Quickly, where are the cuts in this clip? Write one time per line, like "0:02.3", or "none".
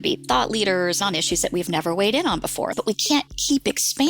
0:01.0
0:02.8